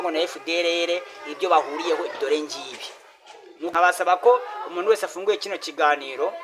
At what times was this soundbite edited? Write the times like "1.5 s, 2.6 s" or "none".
3.7 s

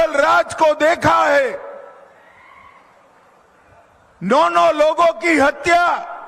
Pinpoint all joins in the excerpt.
none

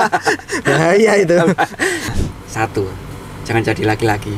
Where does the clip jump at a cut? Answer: 2.1 s

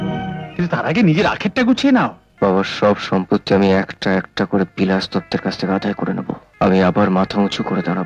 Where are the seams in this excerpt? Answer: 2.2 s, 6.5 s

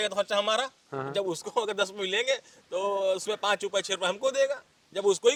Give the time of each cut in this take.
none

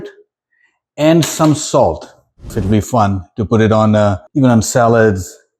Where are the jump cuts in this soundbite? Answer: 2.5 s, 4.2 s

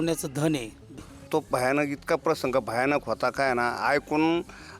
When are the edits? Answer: 0.9 s

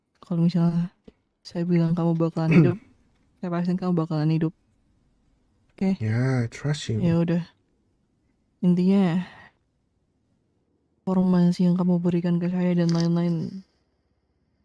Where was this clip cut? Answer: 11.1 s

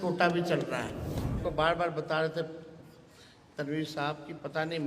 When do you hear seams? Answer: 1.4 s

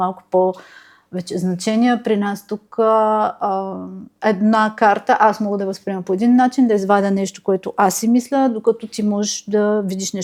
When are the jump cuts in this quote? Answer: none

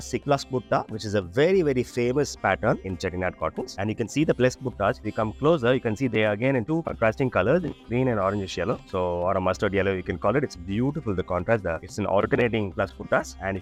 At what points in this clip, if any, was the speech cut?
none

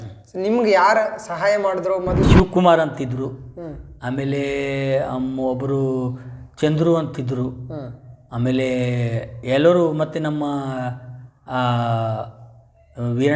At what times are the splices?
2.2 s

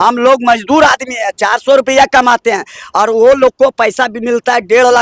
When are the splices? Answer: none

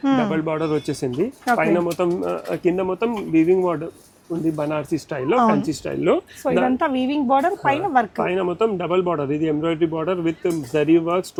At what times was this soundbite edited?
none

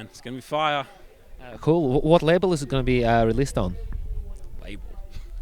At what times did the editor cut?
none

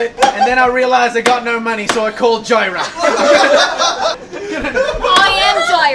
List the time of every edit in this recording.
none

